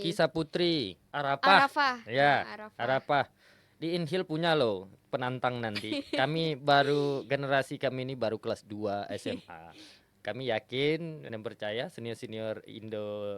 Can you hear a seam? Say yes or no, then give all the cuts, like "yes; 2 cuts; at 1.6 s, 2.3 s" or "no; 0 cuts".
yes; 2 cuts; at 1.1 s, 11.3 s